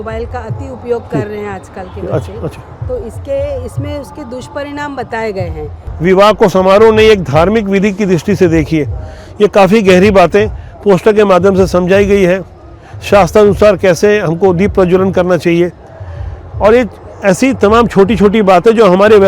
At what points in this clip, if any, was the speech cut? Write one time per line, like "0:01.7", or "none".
0:05.8